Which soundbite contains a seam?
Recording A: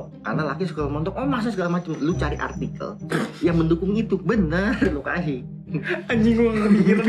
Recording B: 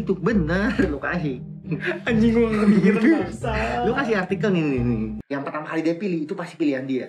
B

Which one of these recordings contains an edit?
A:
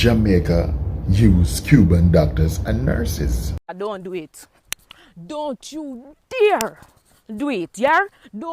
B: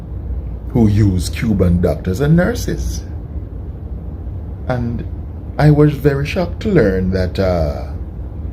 A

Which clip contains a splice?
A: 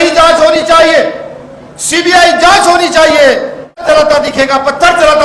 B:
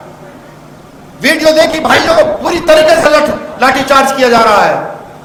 A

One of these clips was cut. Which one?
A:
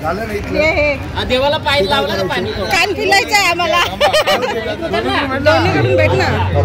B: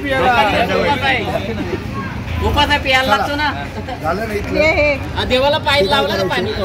A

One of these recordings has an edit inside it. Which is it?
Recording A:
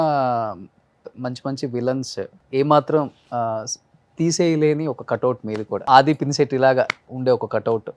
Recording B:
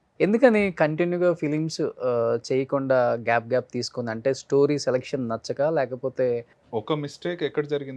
A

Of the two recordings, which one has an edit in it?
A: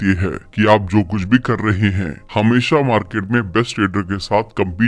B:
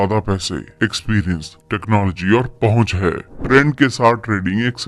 B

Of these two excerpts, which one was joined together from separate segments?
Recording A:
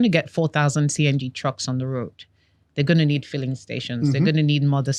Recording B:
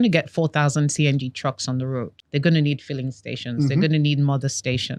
B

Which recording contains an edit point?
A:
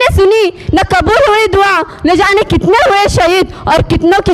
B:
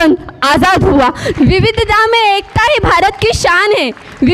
B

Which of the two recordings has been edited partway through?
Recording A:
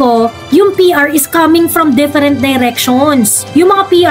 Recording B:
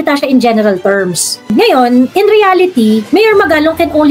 B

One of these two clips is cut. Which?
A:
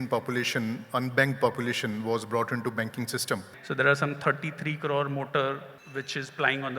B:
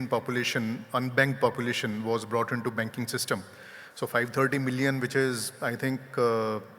A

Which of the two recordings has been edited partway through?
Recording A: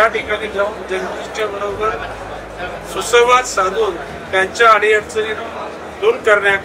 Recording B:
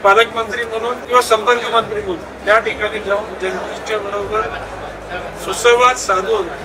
B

